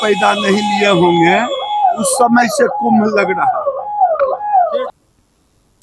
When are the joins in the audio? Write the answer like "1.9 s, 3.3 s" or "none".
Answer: none